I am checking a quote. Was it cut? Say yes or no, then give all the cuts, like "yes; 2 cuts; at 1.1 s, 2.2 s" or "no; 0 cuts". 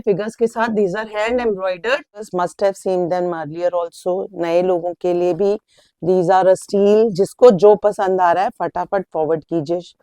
yes; 1 cut; at 2.3 s